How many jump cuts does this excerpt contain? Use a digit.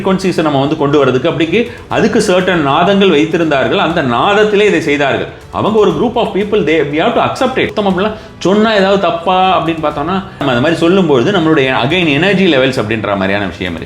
2